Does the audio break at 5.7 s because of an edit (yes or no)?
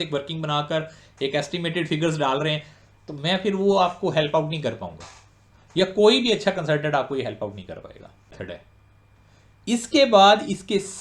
no